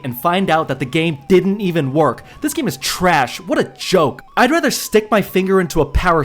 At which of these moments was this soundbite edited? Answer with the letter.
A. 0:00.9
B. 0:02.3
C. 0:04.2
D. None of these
C